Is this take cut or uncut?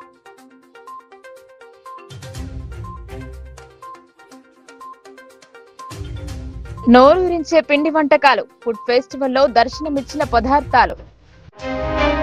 cut